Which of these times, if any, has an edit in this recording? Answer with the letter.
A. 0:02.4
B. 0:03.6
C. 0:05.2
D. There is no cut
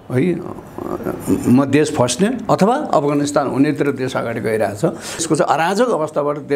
C